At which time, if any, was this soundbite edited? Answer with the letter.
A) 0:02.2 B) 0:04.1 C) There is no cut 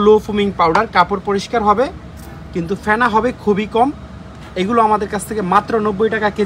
C